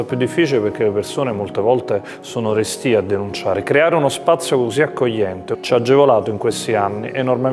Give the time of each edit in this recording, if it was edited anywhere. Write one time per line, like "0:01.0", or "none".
0:05.5